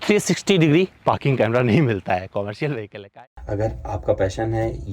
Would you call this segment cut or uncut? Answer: cut